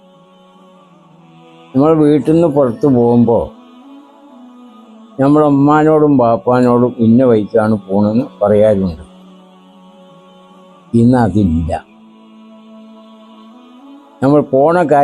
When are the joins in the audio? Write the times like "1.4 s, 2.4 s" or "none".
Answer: 1.0 s, 9.3 s, 10.9 s, 12.5 s, 14.2 s